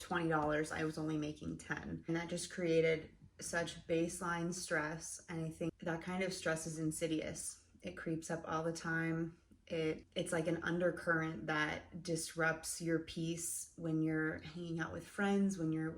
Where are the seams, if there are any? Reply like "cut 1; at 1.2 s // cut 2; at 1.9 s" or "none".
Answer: cut 1; at 2.1 s // cut 2; at 5.7 s // cut 3; at 10.1 s